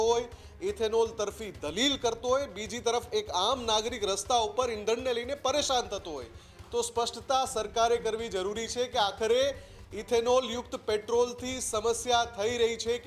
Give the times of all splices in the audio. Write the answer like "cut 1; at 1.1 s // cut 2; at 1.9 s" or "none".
none